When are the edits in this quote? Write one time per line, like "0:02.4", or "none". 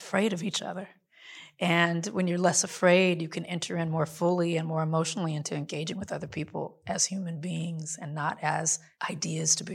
0:08.8